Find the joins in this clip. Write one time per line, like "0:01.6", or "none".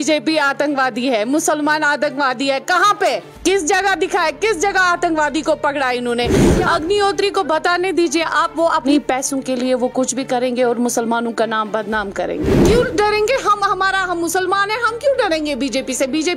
0:03.3
0:06.3
0:08.8
0:12.5